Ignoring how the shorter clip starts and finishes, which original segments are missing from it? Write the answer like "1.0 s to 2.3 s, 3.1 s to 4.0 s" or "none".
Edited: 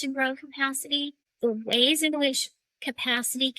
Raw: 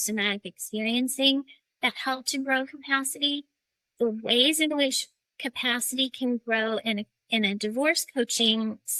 3.5 s to 3.8 s

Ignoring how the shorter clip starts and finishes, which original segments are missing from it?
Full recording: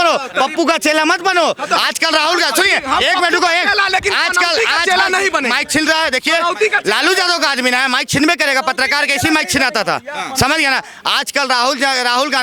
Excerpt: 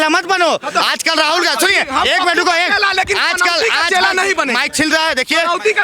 none

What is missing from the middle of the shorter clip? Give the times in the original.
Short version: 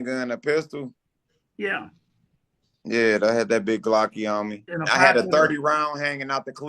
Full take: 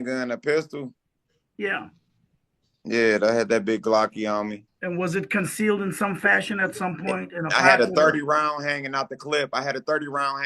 4.7 s to 7.3 s

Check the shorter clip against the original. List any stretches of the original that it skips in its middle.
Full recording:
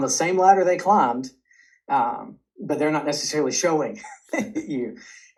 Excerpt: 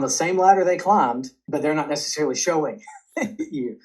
1.3 s to 2.5 s

